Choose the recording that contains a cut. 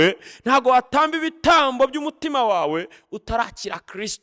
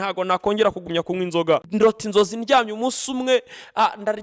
second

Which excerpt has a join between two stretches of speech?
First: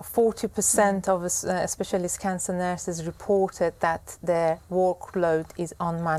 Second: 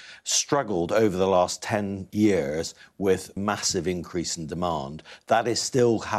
second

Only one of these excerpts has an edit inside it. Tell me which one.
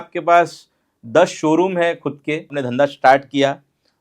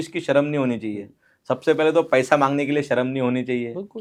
first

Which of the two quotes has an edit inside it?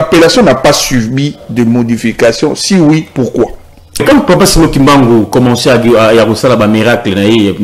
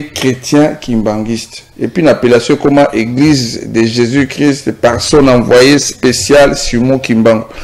first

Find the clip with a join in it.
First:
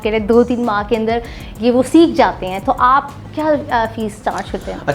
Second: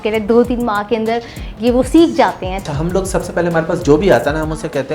second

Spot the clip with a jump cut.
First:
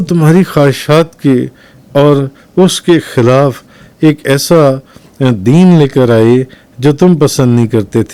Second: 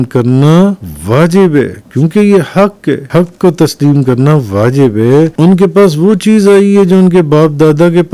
second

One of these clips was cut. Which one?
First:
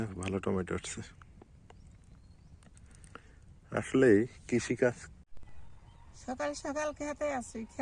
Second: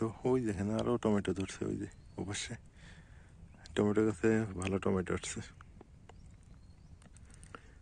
first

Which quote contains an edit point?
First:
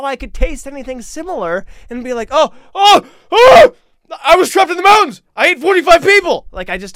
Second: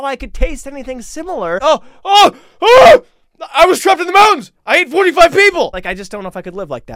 second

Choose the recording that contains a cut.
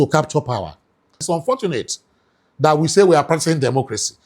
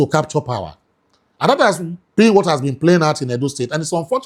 first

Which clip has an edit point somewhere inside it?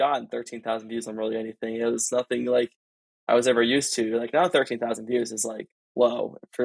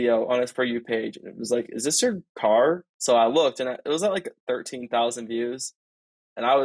second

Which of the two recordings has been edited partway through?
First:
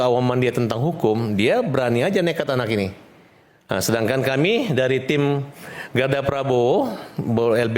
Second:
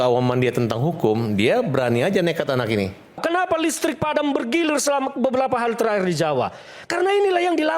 second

